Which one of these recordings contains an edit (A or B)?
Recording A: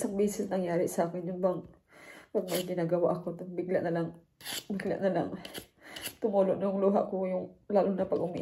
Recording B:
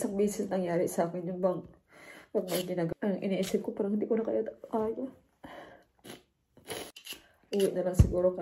B